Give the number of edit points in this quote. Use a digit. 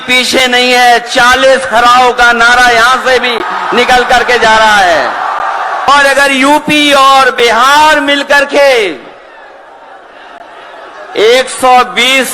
1